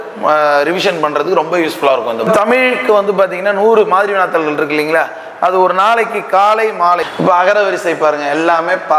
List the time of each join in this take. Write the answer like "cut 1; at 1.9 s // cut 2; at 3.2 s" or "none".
cut 1; at 2.3 s // cut 2; at 7.1 s